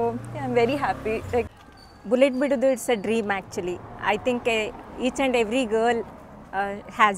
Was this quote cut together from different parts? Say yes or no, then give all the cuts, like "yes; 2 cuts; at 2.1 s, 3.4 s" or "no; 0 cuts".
no; 0 cuts